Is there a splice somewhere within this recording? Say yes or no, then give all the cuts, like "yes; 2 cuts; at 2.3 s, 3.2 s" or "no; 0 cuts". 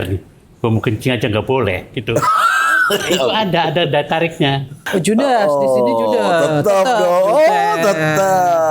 yes; 1 cut; at 4.7 s